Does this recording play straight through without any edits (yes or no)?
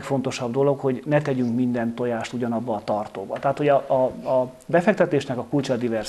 yes